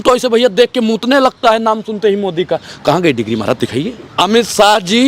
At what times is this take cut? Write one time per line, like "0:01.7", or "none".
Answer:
0:04.0